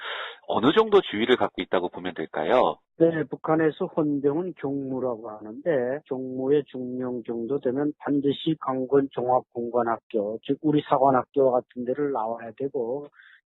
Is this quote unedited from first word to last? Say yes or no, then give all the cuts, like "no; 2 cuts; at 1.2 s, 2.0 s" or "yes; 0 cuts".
no; 1 cut; at 9.5 s